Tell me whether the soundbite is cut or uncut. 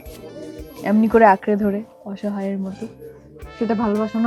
uncut